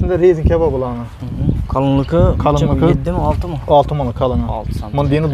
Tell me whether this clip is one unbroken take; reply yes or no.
yes